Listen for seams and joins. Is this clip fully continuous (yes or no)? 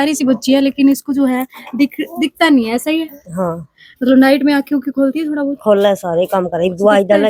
yes